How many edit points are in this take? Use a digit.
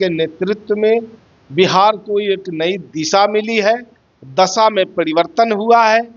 0